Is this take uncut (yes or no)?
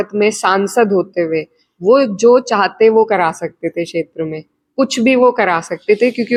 yes